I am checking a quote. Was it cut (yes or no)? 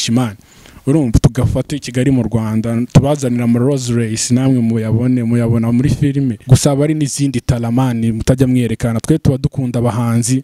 yes